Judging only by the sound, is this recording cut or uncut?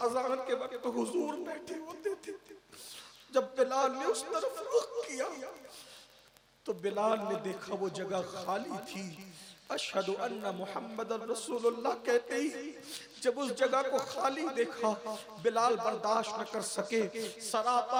uncut